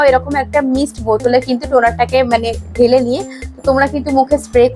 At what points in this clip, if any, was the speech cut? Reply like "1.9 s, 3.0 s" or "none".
none